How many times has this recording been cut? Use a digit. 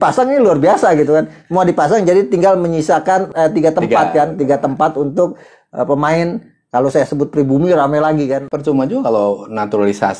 2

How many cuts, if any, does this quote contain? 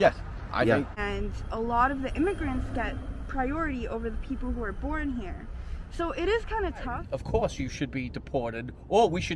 2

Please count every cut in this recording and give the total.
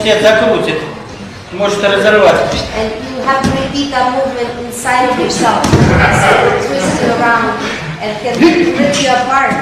2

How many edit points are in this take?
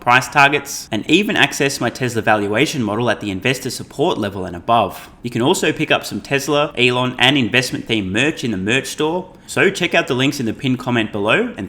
3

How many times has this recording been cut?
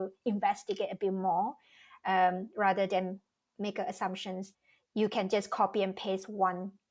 1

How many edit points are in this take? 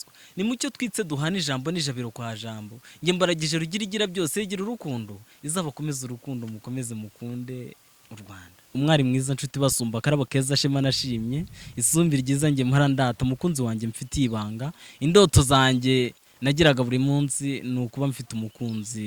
1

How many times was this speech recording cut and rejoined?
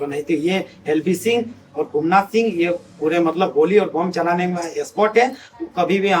0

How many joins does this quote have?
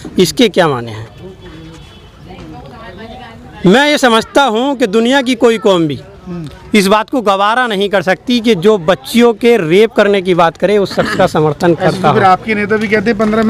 0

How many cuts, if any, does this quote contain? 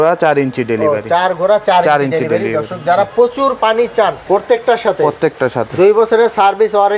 1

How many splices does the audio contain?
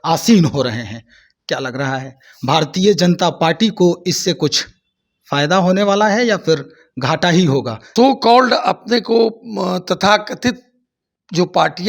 1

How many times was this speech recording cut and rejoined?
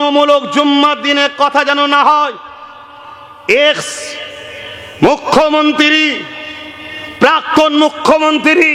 0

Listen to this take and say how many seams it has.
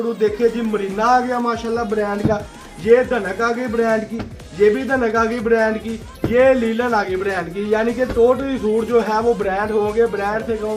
0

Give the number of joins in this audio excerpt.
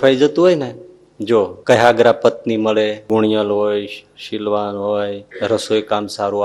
3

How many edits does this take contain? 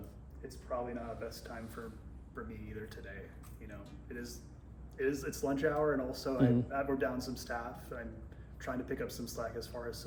0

